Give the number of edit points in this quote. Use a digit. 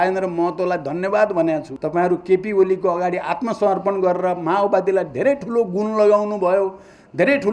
1